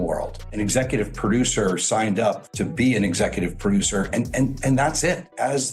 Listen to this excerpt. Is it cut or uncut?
cut